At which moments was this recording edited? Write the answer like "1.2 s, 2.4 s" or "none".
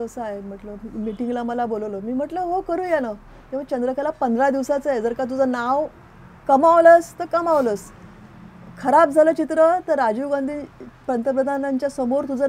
none